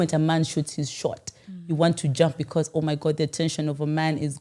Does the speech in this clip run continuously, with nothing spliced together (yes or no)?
yes